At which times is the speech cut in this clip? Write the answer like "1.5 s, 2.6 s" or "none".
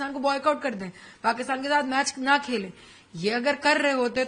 none